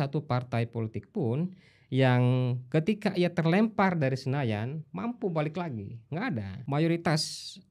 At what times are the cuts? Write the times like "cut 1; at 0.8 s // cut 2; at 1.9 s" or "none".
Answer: cut 1; at 6.5 s